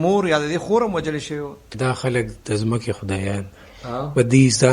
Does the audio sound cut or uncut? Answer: cut